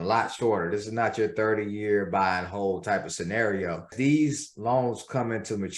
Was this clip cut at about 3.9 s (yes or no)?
yes